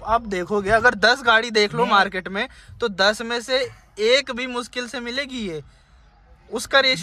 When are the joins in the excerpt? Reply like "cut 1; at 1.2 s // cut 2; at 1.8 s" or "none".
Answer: none